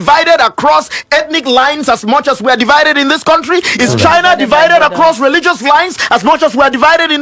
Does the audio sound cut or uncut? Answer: uncut